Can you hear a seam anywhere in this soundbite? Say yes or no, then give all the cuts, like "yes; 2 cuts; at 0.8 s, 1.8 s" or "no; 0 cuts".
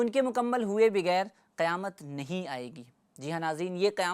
no; 0 cuts